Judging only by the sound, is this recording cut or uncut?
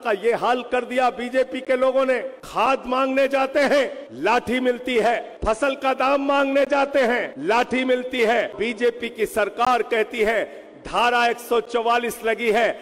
cut